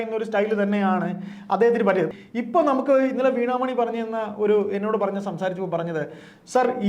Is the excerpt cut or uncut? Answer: cut